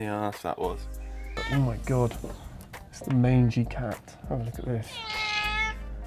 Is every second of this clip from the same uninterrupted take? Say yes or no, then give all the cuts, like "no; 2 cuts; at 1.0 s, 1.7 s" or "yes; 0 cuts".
no; 1 cut; at 1.3 s